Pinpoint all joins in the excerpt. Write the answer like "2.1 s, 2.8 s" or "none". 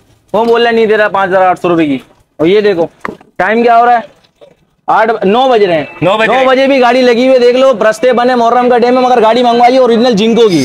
none